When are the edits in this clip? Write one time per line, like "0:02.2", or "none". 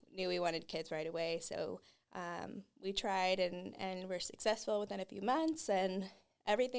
none